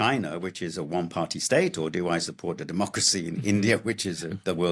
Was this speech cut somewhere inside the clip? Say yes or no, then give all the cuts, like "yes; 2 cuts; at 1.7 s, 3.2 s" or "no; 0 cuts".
no; 0 cuts